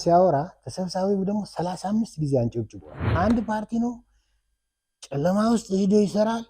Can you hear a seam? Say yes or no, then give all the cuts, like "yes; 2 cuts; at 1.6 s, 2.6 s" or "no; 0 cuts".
yes; 1 cut; at 3.1 s